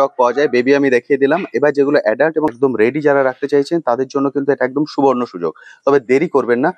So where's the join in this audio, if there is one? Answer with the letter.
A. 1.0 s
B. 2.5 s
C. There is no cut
B